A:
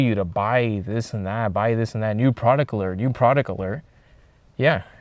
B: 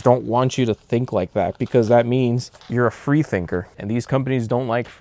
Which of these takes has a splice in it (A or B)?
B